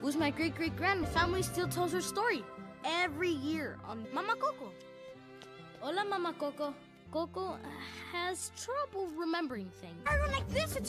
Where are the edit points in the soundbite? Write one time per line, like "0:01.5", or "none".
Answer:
0:06.9